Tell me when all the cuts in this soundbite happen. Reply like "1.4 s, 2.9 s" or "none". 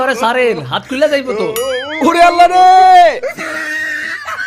3.2 s